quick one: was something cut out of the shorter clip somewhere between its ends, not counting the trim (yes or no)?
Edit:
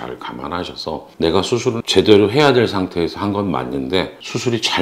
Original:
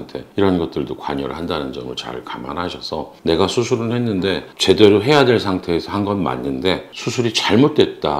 yes